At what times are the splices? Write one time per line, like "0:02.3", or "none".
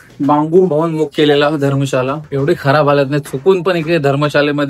0:02.2